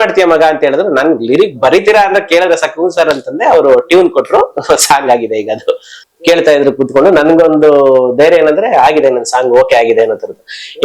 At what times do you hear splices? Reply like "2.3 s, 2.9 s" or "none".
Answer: 5.9 s